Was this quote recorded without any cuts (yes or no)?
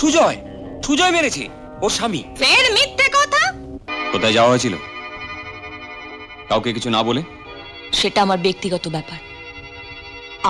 no